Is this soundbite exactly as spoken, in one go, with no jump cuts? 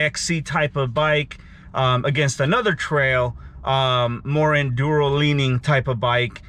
yes; 0 cuts

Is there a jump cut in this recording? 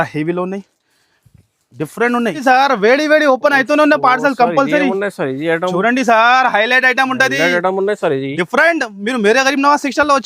yes; 1 cut; at 2.4 s

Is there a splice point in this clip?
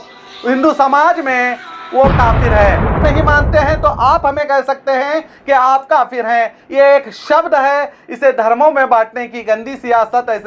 yes; 1 cut; at 3.0 s

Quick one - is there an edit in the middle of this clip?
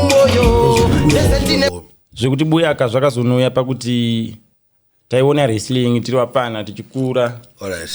yes; 1 cut; at 1.7 s

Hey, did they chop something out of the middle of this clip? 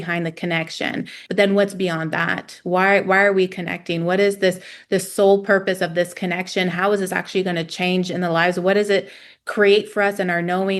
yes; 1 cut; at 1.2 s

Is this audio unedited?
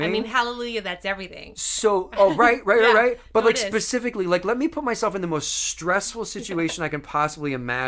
yes; 0 cuts

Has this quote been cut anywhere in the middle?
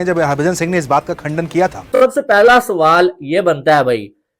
yes; 1 cut; at 1.9 s

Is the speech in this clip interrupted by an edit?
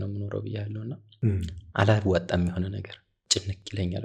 yes; 1 cut; at 3.2 s

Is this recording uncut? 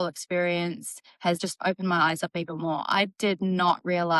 no; 1 cut; at 1.4 s

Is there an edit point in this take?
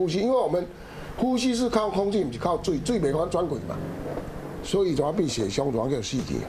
no; 0 cuts

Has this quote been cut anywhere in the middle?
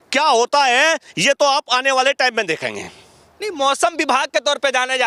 no; 0 cuts

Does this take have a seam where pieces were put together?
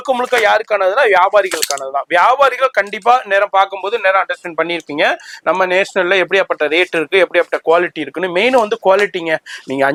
no; 0 cuts

